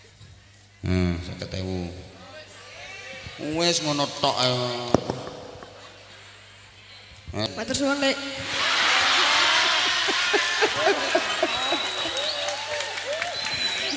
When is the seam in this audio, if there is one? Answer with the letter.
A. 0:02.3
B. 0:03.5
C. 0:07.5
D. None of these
C